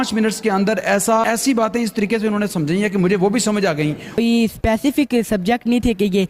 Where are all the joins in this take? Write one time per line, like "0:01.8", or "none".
0:01.2
0:04.2